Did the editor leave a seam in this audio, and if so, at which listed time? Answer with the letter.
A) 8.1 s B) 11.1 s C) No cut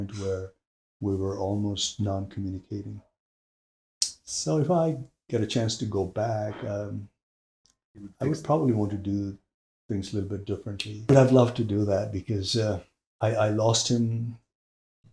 B